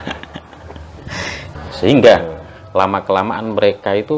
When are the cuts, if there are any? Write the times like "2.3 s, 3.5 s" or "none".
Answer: 1.5 s